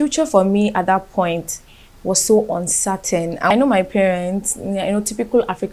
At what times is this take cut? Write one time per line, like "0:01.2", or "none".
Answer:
0:03.5